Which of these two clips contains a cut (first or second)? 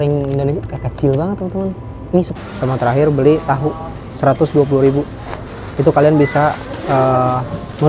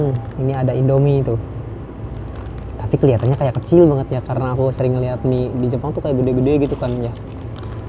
first